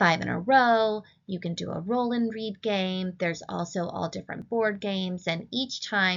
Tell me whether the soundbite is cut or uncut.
cut